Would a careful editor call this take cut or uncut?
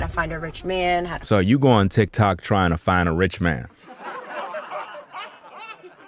uncut